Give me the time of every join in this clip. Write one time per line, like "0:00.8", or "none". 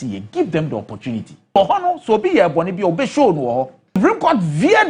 0:01.6
0:04.0